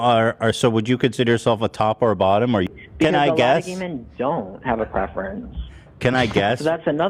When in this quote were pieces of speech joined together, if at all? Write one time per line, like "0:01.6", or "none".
0:02.7